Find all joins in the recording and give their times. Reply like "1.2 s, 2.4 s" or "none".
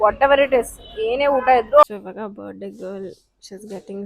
1.8 s